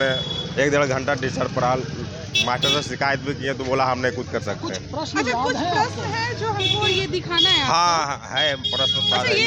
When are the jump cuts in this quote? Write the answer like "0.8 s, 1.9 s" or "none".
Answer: none